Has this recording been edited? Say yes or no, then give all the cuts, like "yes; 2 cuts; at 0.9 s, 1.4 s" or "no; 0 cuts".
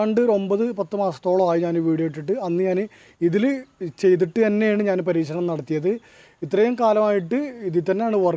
no; 0 cuts